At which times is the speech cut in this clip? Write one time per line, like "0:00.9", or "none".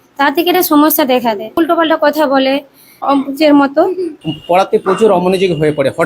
0:01.6
0:03.0
0:04.1